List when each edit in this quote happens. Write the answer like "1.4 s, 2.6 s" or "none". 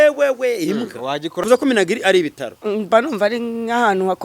1.4 s